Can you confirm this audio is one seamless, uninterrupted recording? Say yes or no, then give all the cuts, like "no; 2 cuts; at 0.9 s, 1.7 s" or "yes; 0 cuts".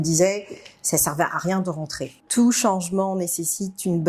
no; 1 cut; at 2.2 s